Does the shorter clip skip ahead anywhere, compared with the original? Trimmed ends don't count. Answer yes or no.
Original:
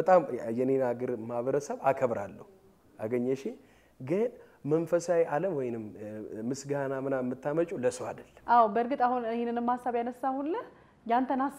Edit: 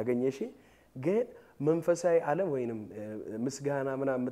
no